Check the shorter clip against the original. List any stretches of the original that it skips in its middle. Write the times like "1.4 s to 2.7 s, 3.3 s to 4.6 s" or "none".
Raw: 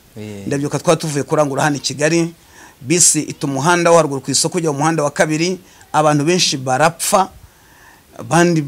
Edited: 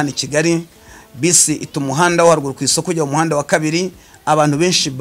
none